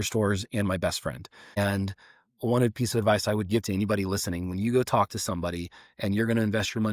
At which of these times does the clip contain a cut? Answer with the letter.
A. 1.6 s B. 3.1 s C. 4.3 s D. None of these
A